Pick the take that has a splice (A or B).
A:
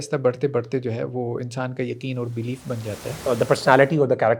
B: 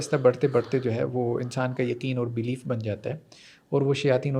A